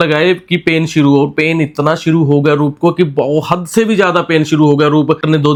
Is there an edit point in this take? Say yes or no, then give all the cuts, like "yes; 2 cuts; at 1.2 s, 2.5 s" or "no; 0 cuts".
no; 0 cuts